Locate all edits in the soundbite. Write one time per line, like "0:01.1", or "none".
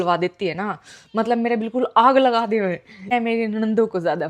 0:03.1